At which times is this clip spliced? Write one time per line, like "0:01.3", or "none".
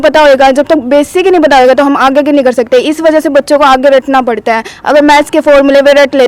none

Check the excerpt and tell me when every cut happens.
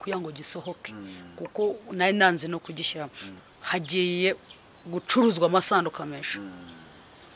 0:03.3

